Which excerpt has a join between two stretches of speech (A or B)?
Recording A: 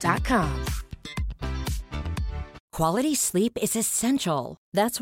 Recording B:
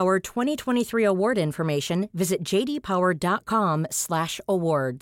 A